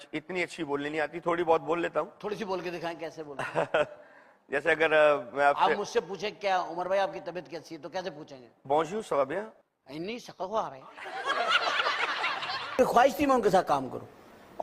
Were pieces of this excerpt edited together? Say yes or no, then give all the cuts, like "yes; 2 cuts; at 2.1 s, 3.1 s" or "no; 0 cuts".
yes; 1 cut; at 12.8 s